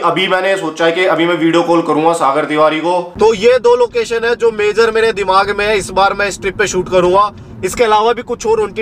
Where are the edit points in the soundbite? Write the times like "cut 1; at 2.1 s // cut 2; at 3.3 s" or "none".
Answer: cut 1; at 3.1 s